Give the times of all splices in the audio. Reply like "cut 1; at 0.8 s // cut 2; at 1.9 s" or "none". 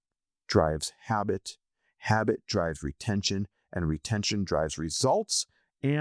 none